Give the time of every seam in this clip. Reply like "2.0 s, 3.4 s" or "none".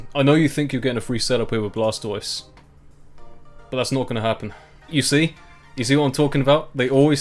4.9 s